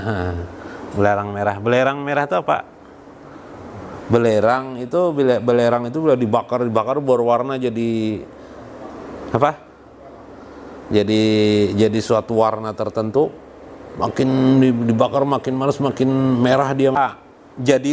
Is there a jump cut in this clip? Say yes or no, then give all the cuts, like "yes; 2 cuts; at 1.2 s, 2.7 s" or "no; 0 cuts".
yes; 1 cut; at 17.0 s